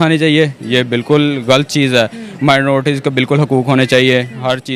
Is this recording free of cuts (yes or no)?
yes